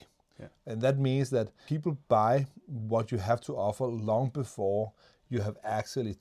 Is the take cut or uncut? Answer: cut